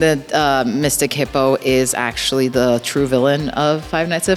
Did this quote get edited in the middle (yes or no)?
no